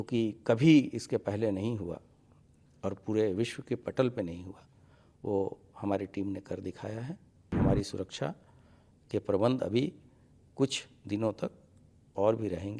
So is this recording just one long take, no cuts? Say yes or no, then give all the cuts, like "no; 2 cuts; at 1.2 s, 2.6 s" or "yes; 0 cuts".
no; 1 cut; at 7.5 s